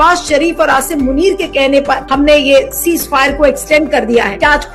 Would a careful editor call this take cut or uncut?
uncut